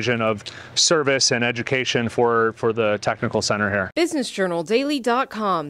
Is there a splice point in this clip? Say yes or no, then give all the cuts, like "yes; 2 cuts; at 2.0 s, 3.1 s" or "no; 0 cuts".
yes; 1 cut; at 3.9 s